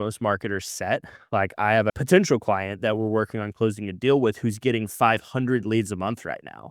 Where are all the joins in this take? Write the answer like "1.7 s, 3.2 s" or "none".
2.0 s

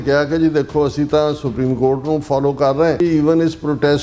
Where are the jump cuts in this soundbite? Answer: 3.0 s

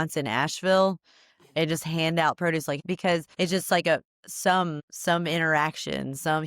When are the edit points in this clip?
2.9 s, 4.9 s

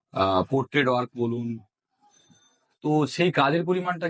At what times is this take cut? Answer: none

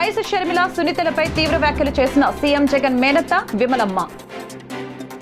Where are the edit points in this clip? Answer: none

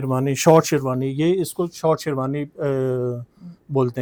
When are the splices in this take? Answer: none

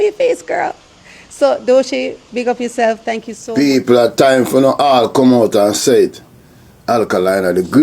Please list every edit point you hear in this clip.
3.3 s

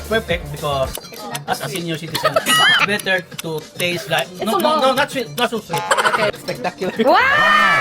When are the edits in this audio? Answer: 2.8 s, 6.3 s

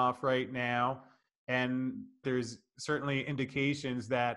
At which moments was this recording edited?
2.2 s

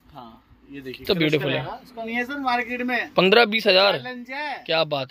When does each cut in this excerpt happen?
2.0 s

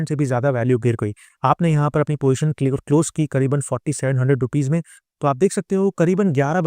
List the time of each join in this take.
1.3 s

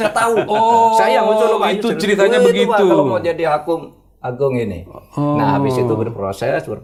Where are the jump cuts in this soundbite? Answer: none

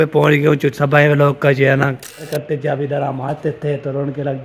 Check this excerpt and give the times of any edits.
2.2 s

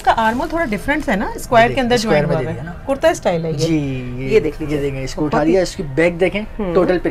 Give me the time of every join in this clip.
none

